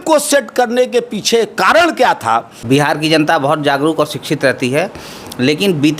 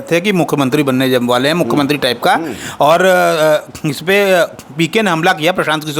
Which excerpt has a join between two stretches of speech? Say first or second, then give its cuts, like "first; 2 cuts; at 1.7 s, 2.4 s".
first; 1 cut; at 2.5 s